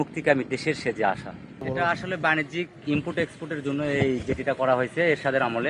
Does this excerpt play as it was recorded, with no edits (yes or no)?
no